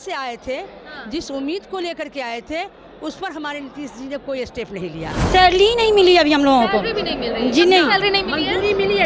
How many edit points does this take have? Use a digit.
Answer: 1